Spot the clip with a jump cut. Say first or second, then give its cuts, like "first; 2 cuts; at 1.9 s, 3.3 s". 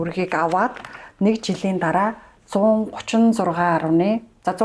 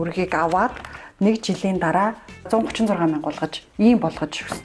second; 1 cut; at 2.5 s